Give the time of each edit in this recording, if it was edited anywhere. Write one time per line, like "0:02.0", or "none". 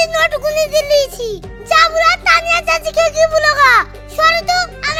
none